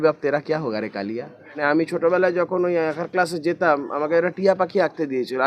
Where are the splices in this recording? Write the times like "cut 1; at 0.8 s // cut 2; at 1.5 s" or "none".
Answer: cut 1; at 1.4 s